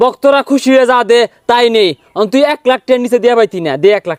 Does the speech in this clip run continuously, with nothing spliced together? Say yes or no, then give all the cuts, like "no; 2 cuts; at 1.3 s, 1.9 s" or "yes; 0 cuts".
yes; 0 cuts